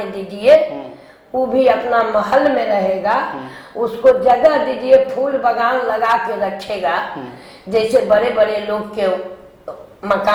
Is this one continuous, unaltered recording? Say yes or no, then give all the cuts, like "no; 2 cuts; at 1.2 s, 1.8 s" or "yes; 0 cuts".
yes; 0 cuts